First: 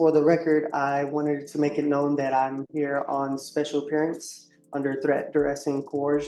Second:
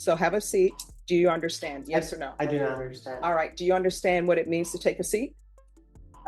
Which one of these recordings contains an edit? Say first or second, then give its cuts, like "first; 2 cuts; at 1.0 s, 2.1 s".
second; 1 cut; at 0.9 s